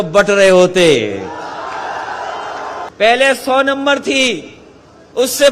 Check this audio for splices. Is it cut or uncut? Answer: cut